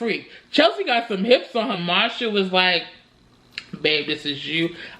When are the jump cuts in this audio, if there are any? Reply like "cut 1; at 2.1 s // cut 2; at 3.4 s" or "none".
cut 1; at 1.8 s